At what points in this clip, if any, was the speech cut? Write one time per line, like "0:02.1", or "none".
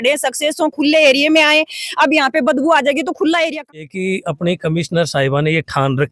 0:03.8